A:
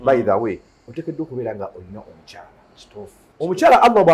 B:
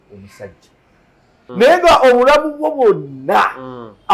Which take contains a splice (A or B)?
B